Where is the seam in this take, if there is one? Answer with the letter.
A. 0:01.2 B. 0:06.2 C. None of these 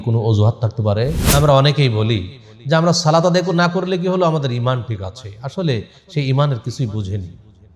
A